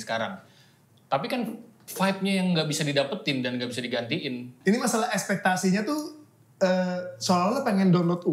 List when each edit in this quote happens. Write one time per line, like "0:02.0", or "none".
0:04.5